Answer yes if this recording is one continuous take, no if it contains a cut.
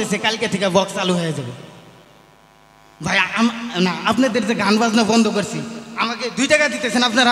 yes